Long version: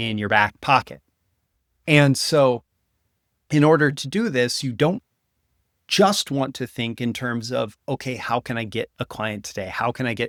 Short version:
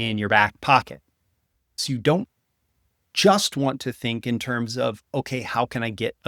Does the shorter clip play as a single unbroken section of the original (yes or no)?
no